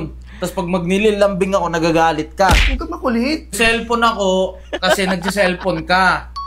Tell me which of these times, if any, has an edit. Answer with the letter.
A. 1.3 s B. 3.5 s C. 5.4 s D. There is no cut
B